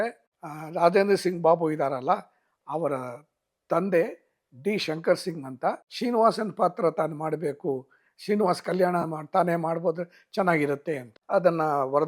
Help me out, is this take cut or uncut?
cut